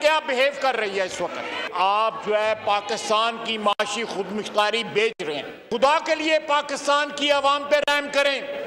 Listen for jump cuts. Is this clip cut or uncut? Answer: cut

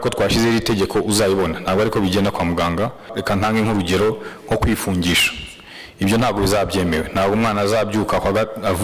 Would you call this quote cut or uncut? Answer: cut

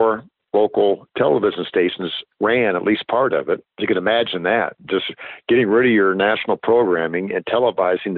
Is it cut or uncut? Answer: cut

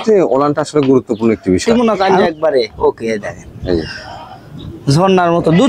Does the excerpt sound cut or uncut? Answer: cut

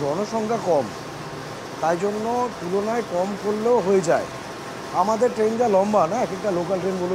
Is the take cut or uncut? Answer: uncut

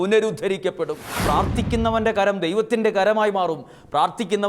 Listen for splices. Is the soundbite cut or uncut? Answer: cut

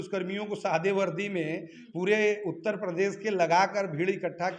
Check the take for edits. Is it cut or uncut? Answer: uncut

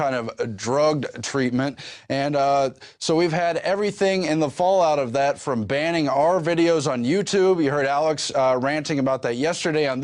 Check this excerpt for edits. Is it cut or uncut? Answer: uncut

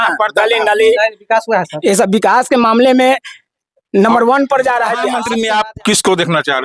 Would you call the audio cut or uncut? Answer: cut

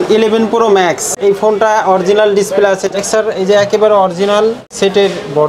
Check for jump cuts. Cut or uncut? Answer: cut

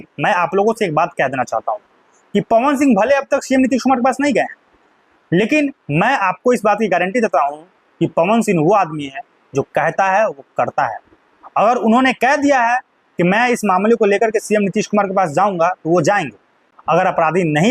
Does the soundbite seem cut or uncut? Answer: cut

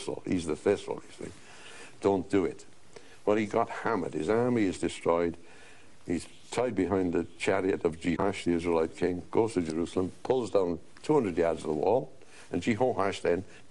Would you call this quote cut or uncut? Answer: uncut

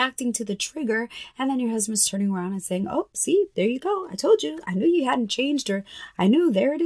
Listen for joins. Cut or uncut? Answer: uncut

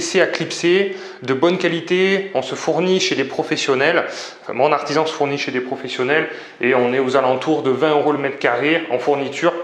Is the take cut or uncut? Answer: uncut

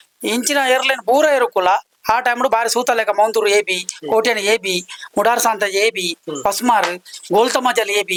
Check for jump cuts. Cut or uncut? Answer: uncut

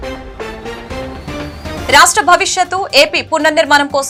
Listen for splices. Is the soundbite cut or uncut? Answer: uncut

